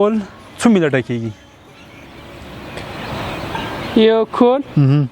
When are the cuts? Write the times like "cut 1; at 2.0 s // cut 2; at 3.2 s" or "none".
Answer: none